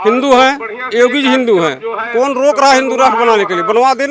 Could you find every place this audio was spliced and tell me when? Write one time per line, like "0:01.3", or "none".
none